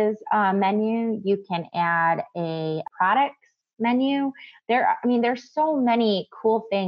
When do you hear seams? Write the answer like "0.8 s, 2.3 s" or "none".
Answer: 2.9 s

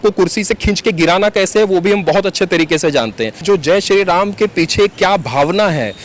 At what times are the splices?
3.4 s

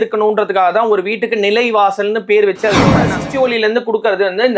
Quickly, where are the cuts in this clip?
3.1 s

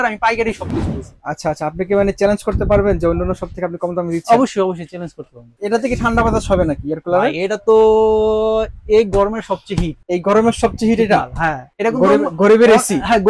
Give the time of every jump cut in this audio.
5.5 s, 9.9 s, 11.7 s

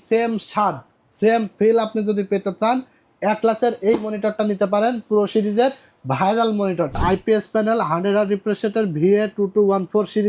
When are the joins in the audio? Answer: 6.9 s

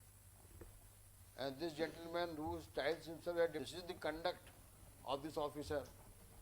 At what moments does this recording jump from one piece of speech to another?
3.6 s

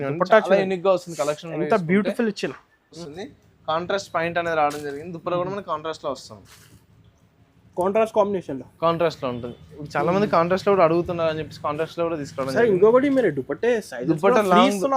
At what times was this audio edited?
3.0 s

